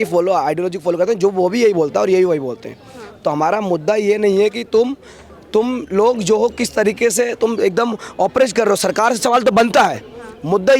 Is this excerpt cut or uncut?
uncut